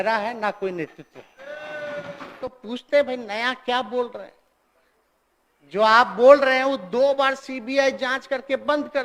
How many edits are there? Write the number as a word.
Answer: one